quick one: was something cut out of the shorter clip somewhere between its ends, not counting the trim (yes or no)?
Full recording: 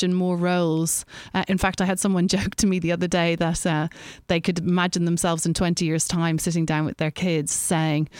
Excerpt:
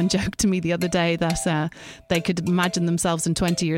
no